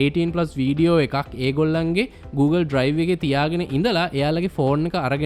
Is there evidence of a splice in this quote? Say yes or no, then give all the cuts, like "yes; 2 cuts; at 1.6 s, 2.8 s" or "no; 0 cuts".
no; 0 cuts